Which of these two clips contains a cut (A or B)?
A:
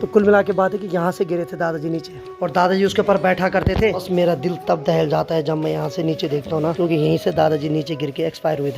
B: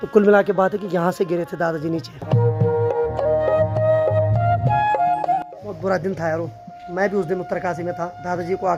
A